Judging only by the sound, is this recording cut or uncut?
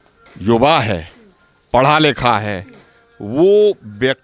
uncut